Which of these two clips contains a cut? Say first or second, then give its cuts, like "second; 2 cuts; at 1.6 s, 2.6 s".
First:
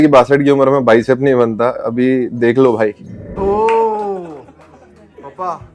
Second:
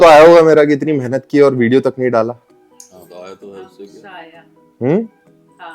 first; 1 cut; at 3.4 s